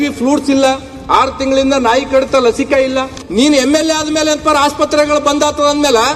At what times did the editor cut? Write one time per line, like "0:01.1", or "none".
0:03.2